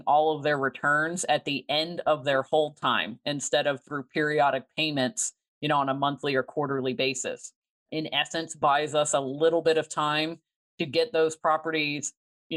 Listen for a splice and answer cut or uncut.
cut